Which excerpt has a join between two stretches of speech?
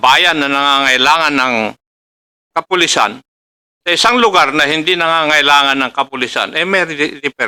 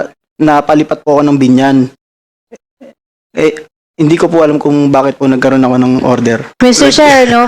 second; 1 cut; at 6.5 s

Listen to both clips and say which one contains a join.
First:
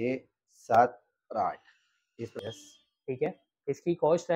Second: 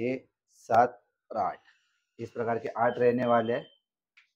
first; 1 cut; at 2.3 s

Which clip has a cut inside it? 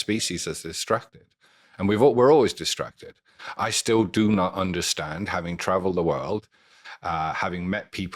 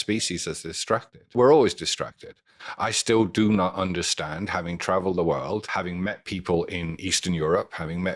second; 2 cuts; at 1.3 s, 5.7 s

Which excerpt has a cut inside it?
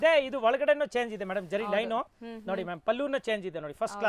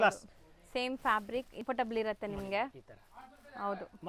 second; 1 cut; at 1.6 s

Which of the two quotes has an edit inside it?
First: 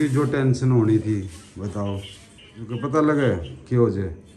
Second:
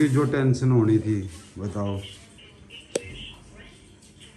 first; 1 cut; at 2.7 s

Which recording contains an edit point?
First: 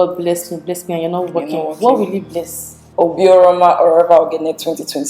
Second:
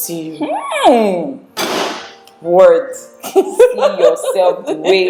first; 1 cut; at 2.8 s

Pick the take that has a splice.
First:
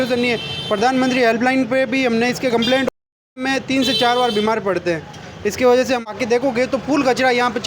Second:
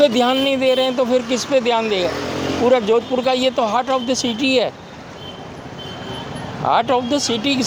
first; 2 cuts; at 3.4 s, 6.0 s

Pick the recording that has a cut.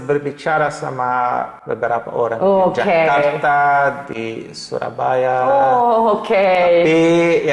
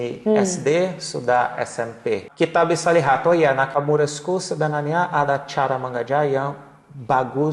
second; 1 cut; at 2.2 s

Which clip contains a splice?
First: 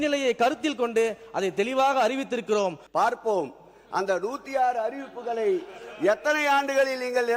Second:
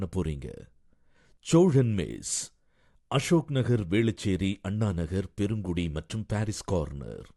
first; 1 cut; at 2.8 s

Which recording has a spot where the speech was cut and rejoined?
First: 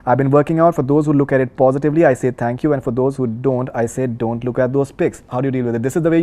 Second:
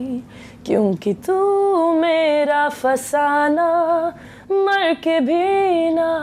first; 1 cut; at 5.3 s

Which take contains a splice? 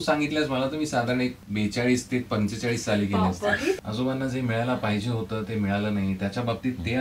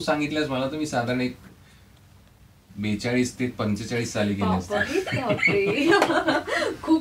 first; 2 cuts; at 1.4 s, 3.8 s

